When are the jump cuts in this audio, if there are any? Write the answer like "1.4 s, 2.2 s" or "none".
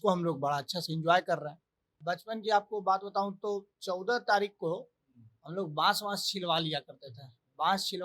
2.0 s